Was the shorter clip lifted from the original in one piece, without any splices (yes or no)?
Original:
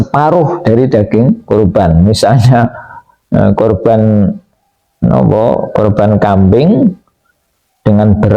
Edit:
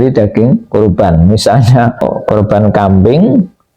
no